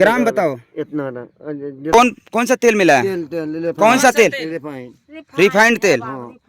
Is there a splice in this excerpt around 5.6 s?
no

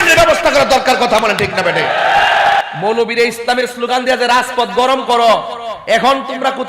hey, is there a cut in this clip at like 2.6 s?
yes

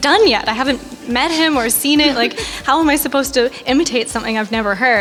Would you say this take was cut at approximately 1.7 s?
no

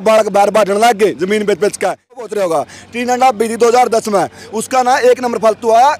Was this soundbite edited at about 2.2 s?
yes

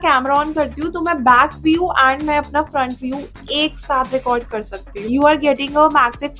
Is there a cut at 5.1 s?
yes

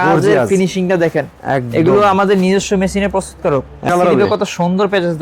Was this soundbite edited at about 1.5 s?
no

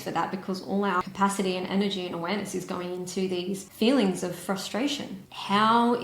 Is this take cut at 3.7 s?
no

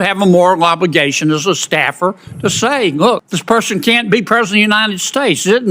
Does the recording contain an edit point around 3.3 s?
yes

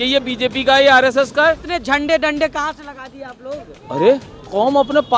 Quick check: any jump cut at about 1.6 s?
yes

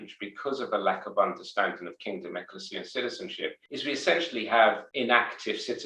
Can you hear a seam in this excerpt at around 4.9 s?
yes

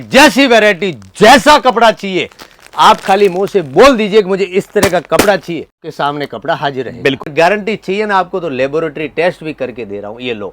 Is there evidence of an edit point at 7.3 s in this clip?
yes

